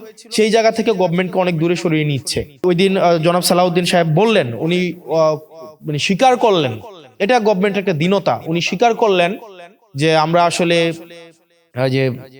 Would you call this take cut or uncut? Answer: cut